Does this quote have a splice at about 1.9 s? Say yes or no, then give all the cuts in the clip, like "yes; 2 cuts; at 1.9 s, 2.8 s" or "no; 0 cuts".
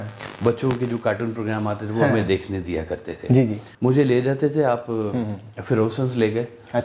no; 1 cut; at 3.7 s